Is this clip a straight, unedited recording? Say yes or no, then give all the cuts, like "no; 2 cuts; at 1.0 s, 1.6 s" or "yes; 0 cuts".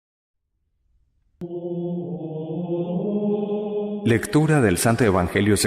yes; 0 cuts